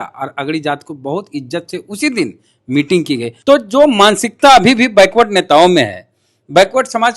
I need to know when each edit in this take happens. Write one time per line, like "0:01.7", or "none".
0:03.3